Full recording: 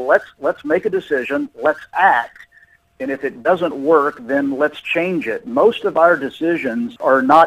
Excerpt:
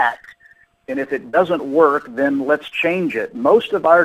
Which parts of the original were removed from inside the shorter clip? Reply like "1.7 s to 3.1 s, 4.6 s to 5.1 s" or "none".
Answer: none